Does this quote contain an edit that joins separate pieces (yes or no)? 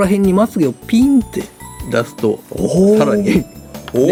no